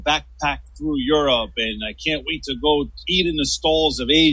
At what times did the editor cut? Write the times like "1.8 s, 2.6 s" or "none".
3.0 s